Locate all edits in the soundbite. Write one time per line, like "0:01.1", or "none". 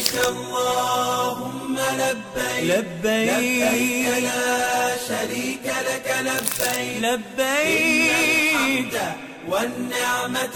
none

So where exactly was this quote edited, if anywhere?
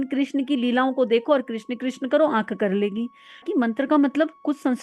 0:03.4

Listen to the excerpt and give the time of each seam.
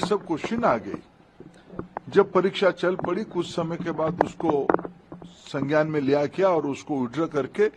none

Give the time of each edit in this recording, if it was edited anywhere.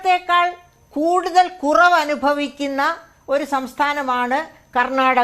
none

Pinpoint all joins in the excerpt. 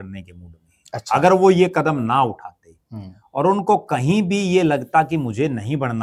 none

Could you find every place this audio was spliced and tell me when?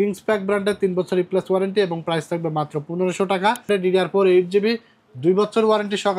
0:03.7

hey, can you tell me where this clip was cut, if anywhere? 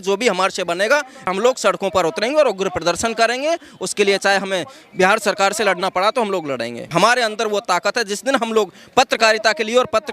0:01.3
0:06.9

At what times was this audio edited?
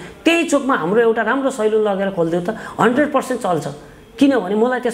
none

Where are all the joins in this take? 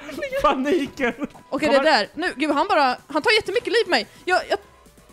0:01.3

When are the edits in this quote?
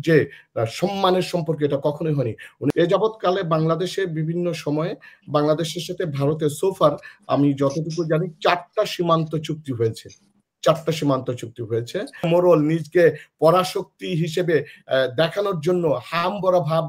0:02.7
0:12.3

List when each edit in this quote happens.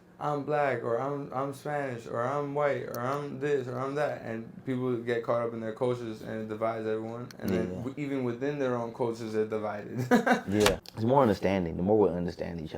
0:10.8

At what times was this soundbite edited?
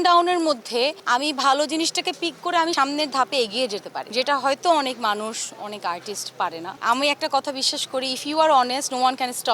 0:01.0
0:02.7
0:04.0
0:06.7

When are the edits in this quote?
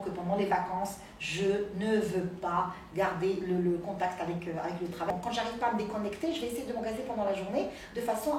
0:05.1

